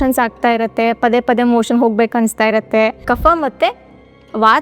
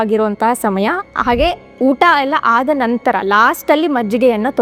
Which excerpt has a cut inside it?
first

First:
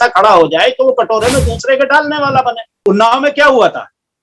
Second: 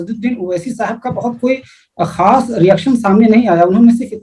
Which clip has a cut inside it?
first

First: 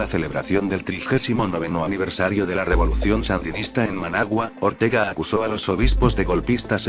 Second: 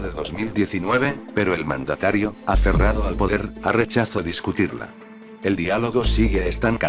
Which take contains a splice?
first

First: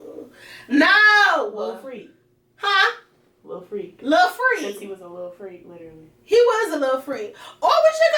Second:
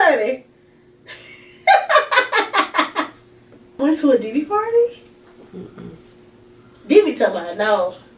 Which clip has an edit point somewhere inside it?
second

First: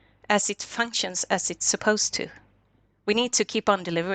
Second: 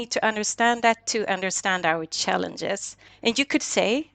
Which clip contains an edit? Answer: second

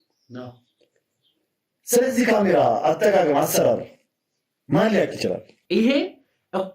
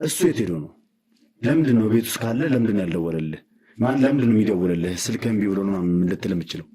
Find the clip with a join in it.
first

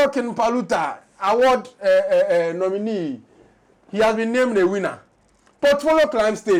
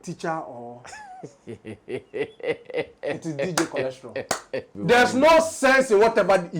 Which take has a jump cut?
second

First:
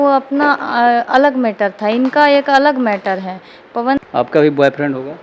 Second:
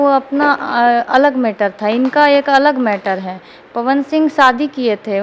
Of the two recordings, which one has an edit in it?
first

